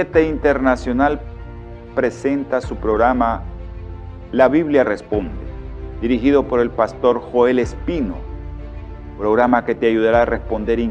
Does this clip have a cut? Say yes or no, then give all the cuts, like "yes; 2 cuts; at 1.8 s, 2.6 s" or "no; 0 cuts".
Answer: yes; 1 cut; at 2.2 s